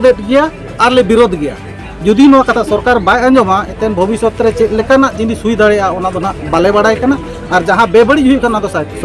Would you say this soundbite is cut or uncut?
uncut